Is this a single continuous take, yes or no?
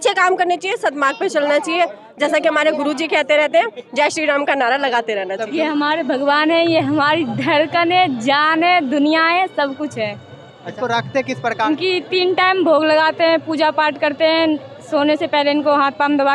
no